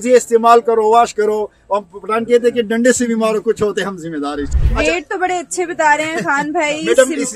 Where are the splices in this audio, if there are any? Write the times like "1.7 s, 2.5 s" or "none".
4.5 s